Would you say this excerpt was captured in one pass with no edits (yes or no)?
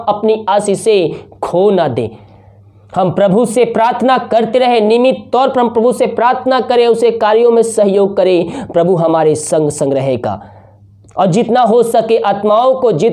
yes